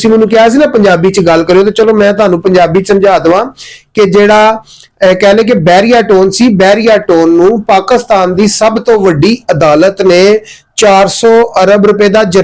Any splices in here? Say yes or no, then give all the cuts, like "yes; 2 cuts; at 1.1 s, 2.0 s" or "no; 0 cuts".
no; 0 cuts